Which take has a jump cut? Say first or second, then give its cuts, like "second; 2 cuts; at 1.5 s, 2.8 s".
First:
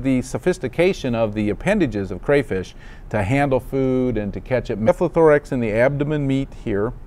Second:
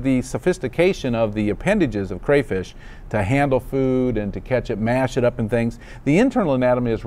second; 1 cut; at 4.7 s